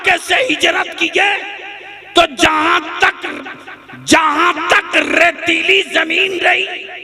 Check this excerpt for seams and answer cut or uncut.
uncut